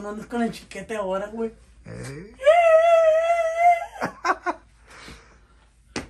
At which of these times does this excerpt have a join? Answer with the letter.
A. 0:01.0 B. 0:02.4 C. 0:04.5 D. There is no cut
D